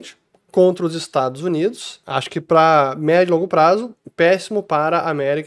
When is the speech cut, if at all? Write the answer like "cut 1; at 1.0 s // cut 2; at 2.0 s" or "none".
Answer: cut 1; at 1.9 s